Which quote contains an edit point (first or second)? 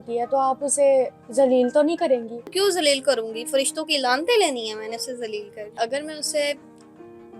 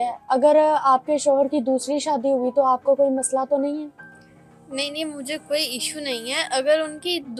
first